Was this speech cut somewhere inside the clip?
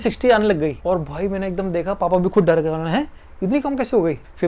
no; 0 cuts

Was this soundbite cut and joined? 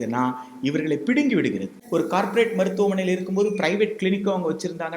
yes; 1 cut; at 1.8 s

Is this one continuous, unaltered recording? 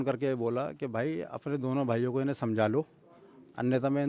yes; 0 cuts

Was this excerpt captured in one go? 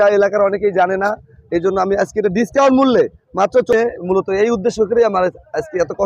no; 1 cut; at 3.7 s

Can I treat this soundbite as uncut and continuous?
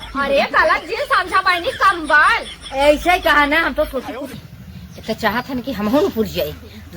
no; 1 cut; at 4.4 s

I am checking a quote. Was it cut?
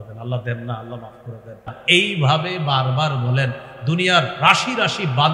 yes; 1 cut; at 1.7 s

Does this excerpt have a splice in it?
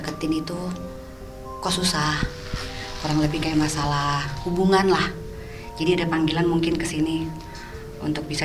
no; 0 cuts

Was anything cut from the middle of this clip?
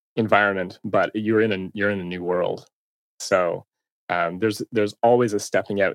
no; 0 cuts

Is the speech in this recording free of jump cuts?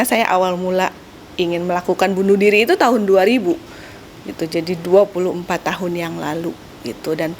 yes; 0 cuts

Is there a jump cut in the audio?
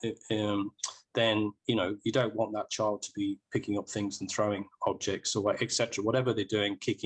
no; 0 cuts

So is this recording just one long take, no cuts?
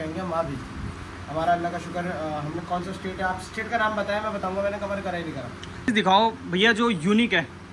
no; 1 cut; at 5.9 s

